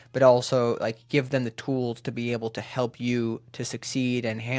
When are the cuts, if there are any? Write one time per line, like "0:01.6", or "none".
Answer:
none

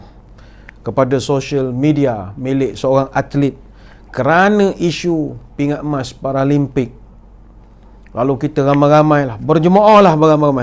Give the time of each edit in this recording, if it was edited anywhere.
none

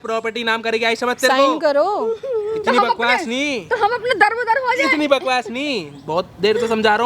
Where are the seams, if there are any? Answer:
none

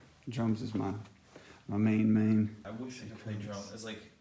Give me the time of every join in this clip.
0:02.6

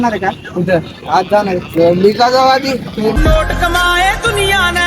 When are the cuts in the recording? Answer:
0:03.1

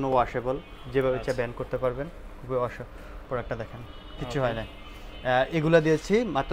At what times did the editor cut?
none

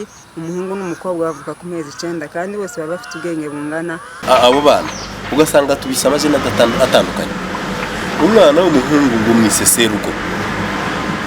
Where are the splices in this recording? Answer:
0:04.2

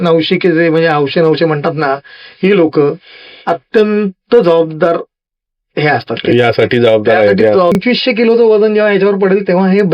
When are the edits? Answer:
0:07.8

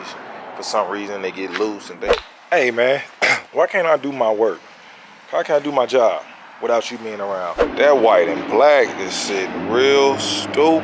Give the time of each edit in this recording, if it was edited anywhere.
0:02.2
0:07.6

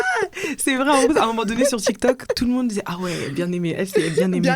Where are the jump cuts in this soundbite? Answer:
none

